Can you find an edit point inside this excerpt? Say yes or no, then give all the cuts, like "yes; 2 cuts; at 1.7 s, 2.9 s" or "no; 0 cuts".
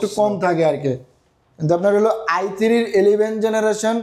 no; 0 cuts